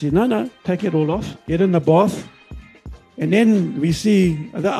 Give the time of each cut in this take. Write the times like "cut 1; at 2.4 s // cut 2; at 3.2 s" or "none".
cut 1; at 1.3 s // cut 2; at 2.8 s